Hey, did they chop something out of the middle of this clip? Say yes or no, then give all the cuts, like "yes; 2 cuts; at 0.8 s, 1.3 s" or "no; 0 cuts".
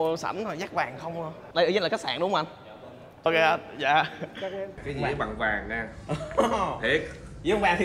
yes; 3 cuts; at 1.5 s, 3.3 s, 4.8 s